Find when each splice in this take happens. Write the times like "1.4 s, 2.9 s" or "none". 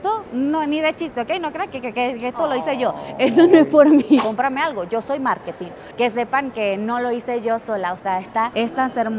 4.2 s, 5.9 s